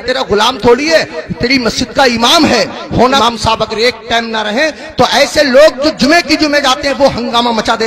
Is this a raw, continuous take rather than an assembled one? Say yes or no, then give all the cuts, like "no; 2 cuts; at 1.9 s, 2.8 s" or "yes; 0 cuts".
no; 1 cut; at 3.2 s